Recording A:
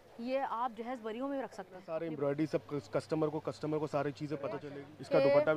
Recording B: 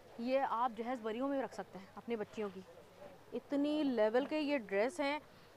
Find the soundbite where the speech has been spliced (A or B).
A